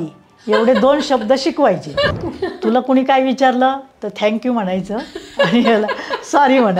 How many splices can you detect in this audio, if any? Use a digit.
1